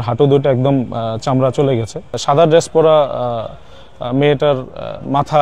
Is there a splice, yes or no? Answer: yes